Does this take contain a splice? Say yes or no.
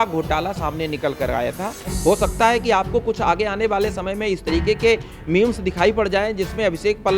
yes